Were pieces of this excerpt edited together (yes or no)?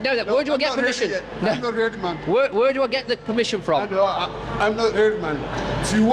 no